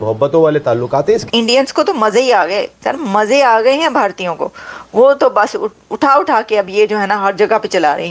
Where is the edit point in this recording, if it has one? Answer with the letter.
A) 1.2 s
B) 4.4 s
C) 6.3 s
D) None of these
A